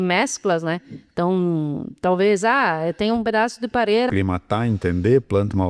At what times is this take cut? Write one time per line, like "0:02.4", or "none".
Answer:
0:04.1